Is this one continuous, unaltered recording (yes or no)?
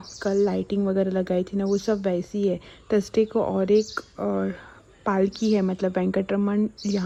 yes